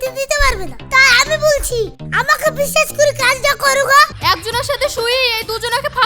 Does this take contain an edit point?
yes; 1 cut; at 4.2 s

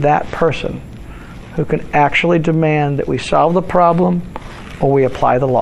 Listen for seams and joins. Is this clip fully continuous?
yes; 0 cuts

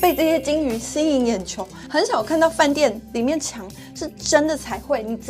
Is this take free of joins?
yes; 0 cuts

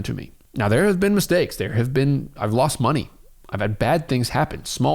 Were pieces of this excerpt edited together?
no; 0 cuts

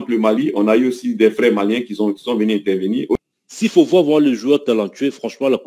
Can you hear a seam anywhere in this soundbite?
yes; 1 cut; at 3.1 s

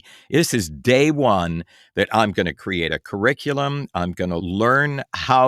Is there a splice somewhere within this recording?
yes; 1 cut; at 4.4 s

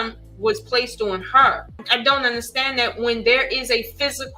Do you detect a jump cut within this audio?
yes; 1 cut; at 1.8 s

